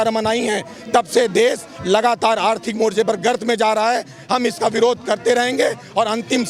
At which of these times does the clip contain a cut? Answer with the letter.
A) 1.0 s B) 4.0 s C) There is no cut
C